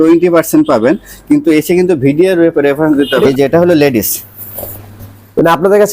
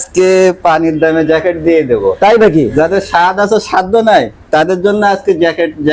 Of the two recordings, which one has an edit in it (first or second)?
first